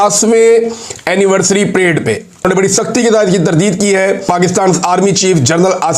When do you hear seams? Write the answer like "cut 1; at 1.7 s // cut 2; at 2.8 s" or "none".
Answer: cut 1; at 2.4 s // cut 2; at 4.3 s